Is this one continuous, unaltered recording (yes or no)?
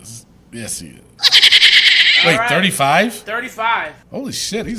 yes